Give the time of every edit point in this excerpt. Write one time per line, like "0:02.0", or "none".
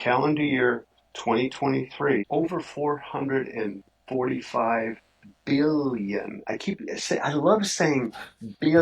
0:02.2